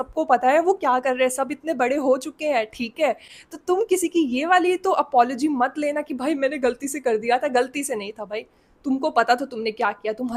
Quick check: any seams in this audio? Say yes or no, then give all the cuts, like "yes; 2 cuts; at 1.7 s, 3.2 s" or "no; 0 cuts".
no; 0 cuts